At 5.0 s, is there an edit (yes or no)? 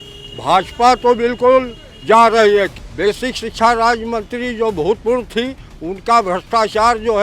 no